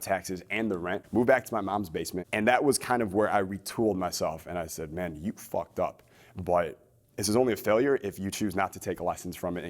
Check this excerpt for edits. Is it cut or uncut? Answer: cut